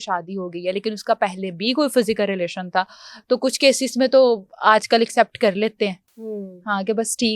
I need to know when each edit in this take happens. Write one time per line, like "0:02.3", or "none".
none